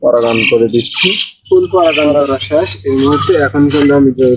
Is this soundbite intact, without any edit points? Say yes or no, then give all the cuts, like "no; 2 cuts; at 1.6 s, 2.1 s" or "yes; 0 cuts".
no; 1 cut; at 1.3 s